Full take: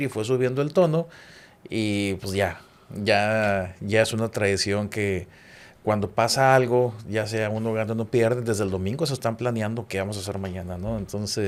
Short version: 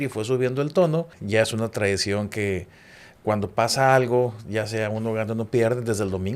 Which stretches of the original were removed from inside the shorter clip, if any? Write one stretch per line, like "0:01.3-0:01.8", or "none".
0:01.2-0:03.8